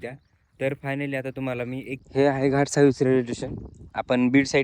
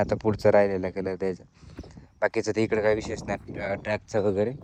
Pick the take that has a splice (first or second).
first